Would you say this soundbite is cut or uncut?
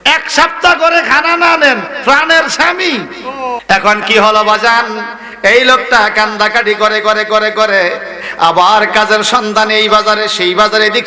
cut